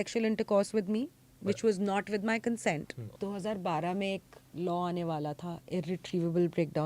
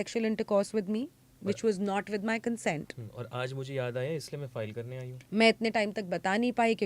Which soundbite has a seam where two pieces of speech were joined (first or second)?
first